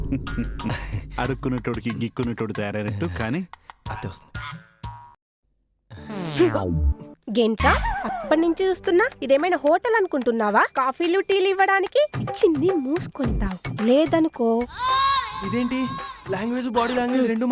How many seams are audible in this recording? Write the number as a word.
one